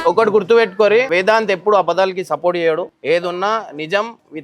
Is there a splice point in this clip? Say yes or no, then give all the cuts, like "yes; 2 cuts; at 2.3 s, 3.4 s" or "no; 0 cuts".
yes; 2 cuts; at 1.1 s, 2.9 s